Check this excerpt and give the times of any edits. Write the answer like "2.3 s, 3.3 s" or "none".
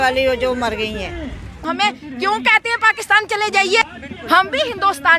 1.7 s, 3.8 s